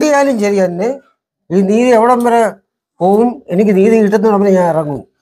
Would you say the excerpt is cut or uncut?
uncut